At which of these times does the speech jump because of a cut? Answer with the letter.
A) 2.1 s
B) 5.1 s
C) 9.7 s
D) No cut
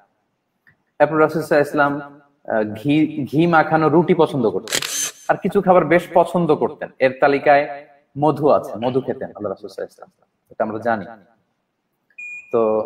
B